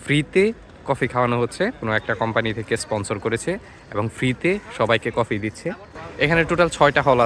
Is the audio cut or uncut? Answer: uncut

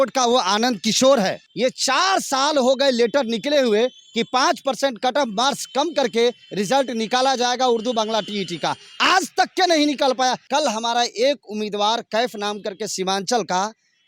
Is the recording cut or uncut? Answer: cut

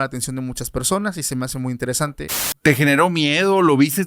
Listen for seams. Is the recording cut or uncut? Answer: cut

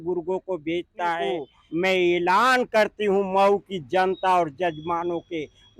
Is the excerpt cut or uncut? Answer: cut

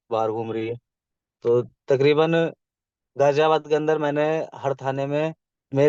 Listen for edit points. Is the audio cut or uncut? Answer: uncut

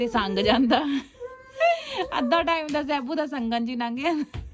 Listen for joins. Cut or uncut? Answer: uncut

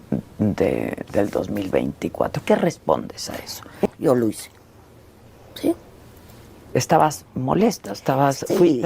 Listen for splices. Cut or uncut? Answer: cut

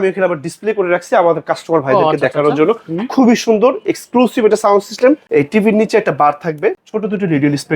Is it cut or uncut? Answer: cut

